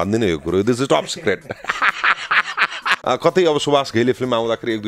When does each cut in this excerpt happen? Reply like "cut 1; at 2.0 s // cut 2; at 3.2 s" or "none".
cut 1; at 2.9 s